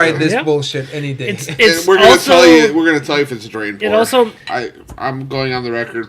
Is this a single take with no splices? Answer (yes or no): no